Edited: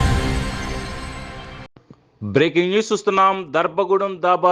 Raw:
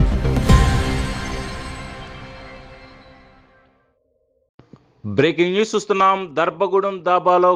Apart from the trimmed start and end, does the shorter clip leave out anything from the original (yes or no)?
yes